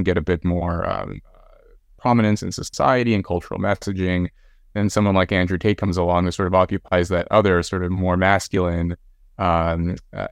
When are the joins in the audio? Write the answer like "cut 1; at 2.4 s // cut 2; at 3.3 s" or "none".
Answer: none